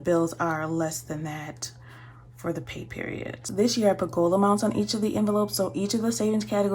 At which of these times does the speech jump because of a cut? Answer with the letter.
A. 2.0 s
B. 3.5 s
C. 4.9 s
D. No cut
B